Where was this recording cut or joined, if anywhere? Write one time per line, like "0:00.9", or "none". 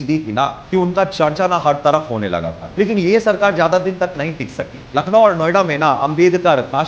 0:02.6
0:04.8